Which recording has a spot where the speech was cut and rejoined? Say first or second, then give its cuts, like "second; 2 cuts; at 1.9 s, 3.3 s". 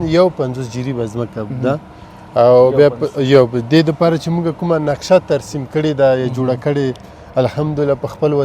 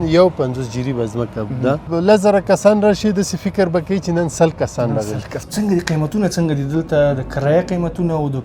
second; 2 cuts; at 1.9 s, 5.3 s